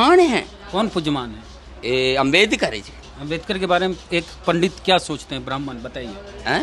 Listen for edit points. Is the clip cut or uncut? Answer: uncut